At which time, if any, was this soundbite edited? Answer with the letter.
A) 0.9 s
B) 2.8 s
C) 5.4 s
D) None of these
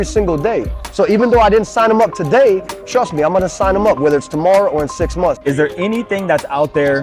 C